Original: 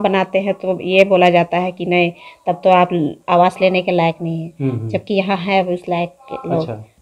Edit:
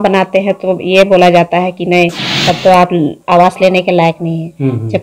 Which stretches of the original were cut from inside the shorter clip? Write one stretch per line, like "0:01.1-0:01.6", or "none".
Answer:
none